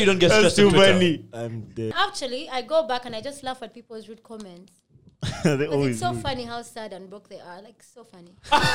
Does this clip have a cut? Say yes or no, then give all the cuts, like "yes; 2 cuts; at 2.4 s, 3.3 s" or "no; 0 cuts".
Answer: yes; 1 cut; at 1.9 s